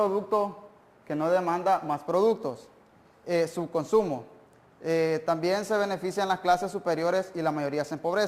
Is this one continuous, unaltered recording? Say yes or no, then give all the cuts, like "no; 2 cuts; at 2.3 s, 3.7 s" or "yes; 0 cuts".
no; 1 cut; at 2.6 s